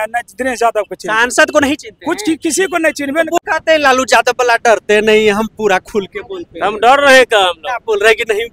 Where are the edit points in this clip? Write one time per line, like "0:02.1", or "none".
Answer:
0:03.4